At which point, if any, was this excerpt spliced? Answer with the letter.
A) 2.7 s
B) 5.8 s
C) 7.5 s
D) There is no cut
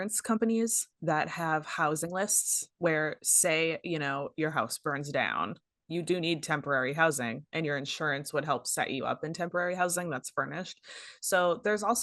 D